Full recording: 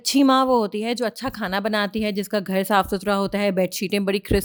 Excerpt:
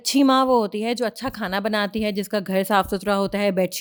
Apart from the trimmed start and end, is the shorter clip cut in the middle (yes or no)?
no